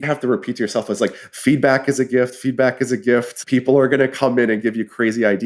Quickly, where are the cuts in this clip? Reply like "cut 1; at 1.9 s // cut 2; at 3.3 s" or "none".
cut 1; at 3.3 s